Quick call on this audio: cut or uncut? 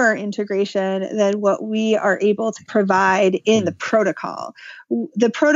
cut